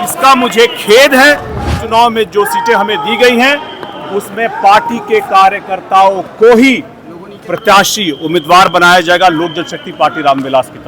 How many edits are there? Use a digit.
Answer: 1